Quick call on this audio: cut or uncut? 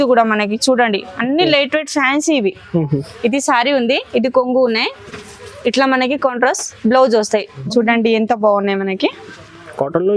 cut